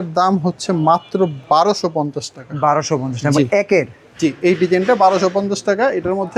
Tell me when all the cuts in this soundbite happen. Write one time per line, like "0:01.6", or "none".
none